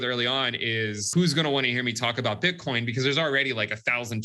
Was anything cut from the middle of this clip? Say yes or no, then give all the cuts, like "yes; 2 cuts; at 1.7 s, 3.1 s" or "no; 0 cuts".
yes; 1 cut; at 1.1 s